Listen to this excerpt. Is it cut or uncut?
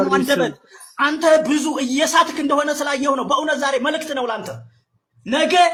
uncut